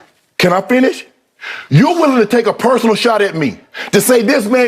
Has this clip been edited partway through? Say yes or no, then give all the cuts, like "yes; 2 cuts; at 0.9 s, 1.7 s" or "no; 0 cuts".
yes; 1 cut; at 2.6 s